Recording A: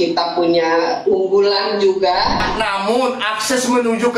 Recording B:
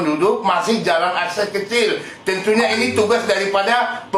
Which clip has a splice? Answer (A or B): A